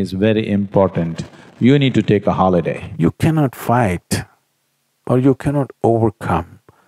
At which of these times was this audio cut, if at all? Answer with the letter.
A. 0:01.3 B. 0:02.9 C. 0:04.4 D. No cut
B